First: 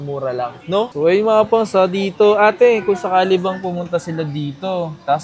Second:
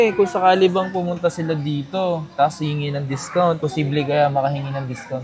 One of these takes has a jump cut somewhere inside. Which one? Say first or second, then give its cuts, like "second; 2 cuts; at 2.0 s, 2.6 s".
first; 1 cut; at 0.9 s